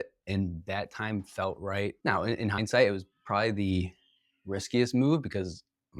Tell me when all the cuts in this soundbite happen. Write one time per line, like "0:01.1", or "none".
0:02.0